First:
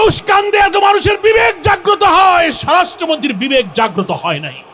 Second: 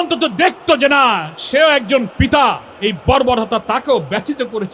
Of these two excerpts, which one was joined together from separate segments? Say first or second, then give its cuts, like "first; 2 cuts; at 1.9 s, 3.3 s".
second; 1 cut; at 1.3 s